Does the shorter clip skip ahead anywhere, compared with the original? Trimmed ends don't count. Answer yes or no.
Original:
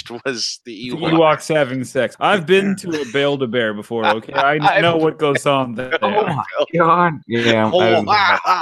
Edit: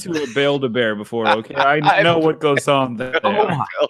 no